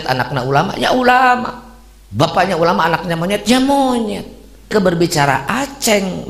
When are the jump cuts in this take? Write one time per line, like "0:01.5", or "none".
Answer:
0:04.7